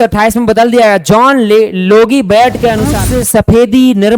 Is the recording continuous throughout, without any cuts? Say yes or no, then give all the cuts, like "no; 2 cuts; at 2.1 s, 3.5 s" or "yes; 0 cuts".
no; 1 cut; at 3.0 s